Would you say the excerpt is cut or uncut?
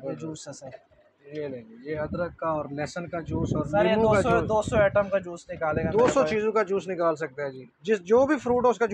uncut